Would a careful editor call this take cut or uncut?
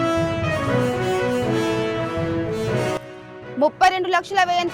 cut